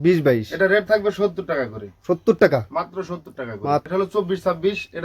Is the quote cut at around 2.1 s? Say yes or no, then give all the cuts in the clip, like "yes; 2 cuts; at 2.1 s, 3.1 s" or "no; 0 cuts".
no; 1 cut; at 3.9 s